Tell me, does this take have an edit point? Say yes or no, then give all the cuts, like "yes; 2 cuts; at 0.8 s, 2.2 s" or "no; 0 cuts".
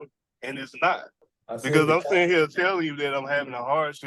yes; 1 cut; at 1.3 s